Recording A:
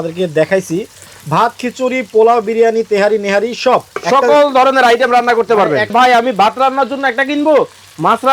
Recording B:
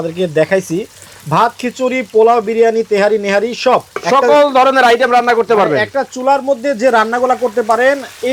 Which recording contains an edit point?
A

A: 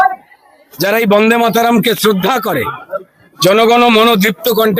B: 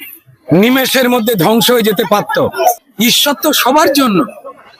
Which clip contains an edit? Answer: B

